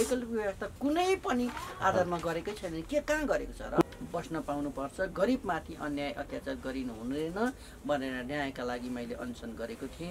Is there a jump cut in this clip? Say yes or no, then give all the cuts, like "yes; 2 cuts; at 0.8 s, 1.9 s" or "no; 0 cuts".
yes; 1 cut; at 3.8 s